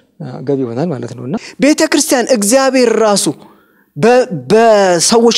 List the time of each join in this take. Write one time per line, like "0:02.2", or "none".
0:01.5